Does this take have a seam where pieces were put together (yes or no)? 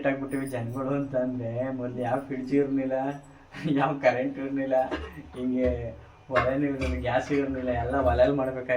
no